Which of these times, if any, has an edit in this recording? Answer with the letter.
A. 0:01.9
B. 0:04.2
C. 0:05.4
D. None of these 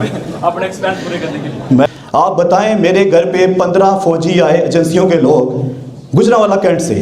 A